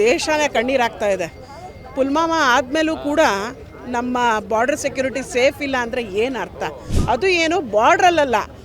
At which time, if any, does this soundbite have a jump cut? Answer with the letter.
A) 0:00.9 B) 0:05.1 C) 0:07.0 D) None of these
C